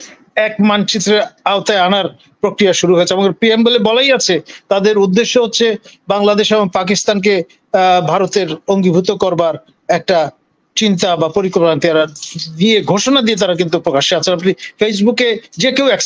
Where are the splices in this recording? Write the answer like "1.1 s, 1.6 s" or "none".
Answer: none